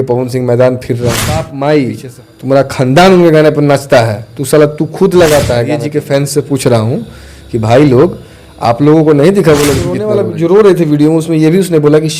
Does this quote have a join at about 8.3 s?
no; 3 cuts; at 1.5 s, 5.8 s, 10.1 s

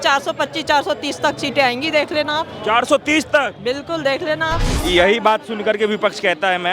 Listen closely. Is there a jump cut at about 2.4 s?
no; 1 cut; at 4.7 s

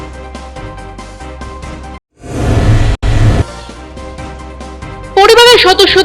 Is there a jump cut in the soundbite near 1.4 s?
yes; 1 cut; at 1.4 s

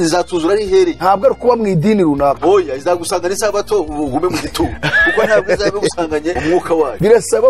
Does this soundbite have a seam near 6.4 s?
no; 0 cuts

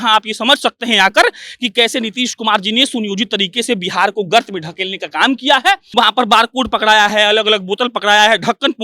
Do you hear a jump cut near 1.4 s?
no; 1 cut; at 5.8 s

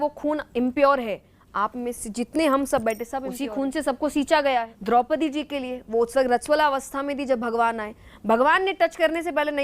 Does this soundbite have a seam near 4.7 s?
yes; 1 cut; at 4.7 s

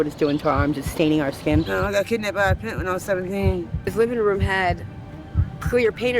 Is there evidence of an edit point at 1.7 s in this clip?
yes; 2 cuts; at 1.7 s, 3.9 s

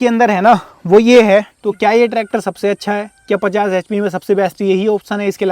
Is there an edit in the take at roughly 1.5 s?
yes; 1 cut; at 1.5 s

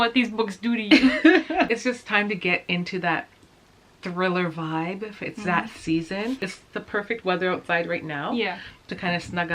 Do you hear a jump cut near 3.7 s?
no; 2 cuts; at 1.7 s, 6.5 s

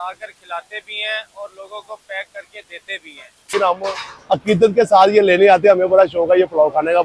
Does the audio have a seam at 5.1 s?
no; 1 cut; at 3.5 s

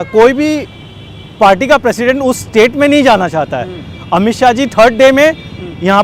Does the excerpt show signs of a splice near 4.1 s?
no; 0 cuts

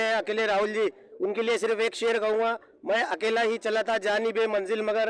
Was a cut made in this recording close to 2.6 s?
no; 0 cuts

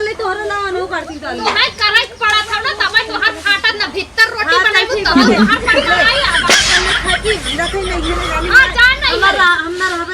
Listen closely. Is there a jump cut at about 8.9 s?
yes; 1 cut; at 8.9 s

